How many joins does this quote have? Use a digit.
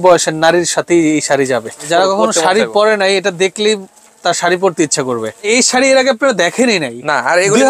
2